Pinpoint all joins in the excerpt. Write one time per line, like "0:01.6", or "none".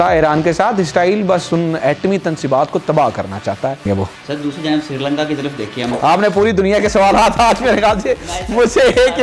0:03.8